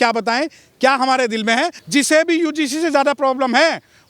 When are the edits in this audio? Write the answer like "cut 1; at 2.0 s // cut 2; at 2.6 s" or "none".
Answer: cut 1; at 1.8 s